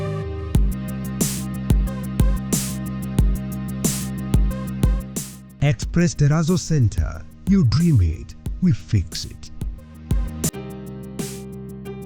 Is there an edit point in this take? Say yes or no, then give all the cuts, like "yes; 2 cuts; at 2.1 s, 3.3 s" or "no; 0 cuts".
yes; 1 cut; at 10.5 s